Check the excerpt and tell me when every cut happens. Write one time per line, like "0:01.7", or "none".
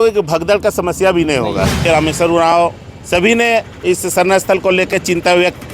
0:01.8